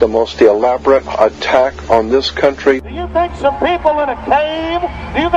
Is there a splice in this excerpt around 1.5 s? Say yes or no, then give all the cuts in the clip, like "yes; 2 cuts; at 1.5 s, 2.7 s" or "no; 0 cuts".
no; 1 cut; at 3.8 s